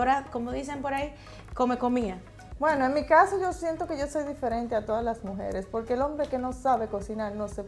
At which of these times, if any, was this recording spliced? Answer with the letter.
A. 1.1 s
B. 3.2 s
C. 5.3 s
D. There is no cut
D